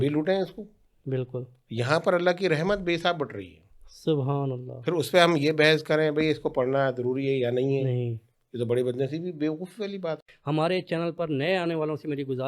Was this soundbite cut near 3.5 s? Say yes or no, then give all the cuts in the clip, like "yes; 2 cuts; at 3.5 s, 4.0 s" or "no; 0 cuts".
no; 1 cut; at 10.2 s